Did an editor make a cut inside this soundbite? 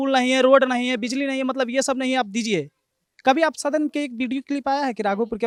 no; 0 cuts

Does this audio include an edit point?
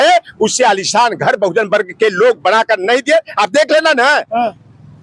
no; 0 cuts

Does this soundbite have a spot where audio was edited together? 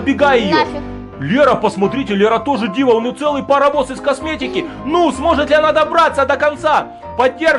no; 0 cuts

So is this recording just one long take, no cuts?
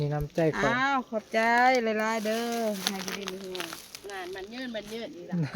yes; 0 cuts

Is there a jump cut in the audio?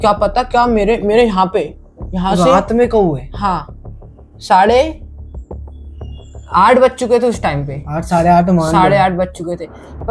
no; 0 cuts

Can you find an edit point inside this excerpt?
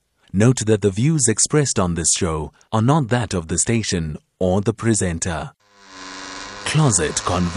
yes; 1 cut; at 5.7 s

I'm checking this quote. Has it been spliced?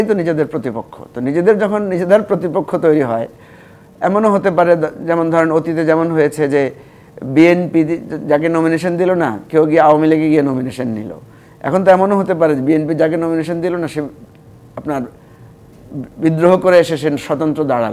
no; 0 cuts

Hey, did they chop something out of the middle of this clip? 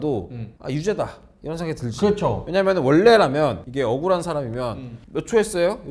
no; 0 cuts

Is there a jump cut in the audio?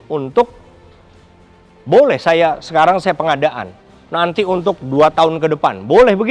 no; 0 cuts

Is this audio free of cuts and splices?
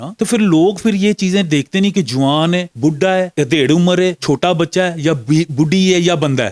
yes; 0 cuts

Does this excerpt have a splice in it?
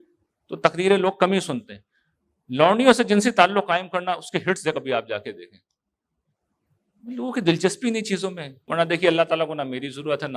yes; 1 cut; at 8.6 s

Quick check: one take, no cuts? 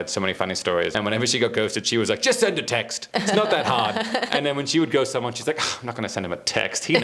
no; 2 cuts; at 0.9 s, 3.0 s

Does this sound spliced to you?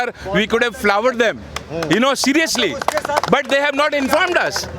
no; 0 cuts

